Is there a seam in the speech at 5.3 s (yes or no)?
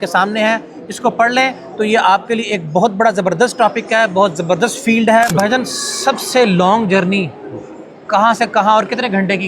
yes